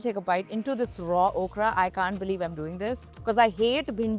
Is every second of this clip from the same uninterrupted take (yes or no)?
yes